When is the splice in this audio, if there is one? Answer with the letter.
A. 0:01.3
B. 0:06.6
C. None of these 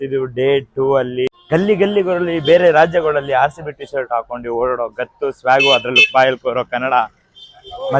A